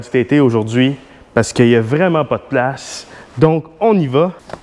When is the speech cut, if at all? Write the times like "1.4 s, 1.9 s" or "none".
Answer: none